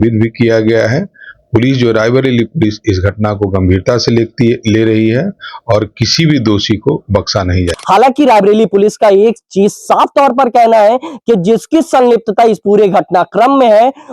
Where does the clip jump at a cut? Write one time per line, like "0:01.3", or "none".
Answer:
0:07.7